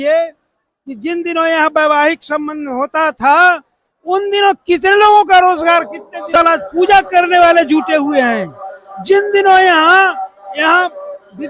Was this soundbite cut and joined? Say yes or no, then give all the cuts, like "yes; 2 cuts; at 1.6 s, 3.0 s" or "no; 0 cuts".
yes; 1 cut; at 6.3 s